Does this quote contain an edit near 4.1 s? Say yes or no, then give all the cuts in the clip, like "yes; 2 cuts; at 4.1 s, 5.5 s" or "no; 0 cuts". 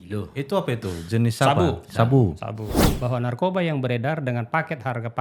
no; 1 cut; at 2.7 s